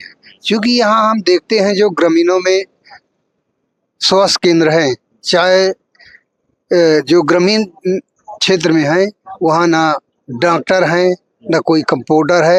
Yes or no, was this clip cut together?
no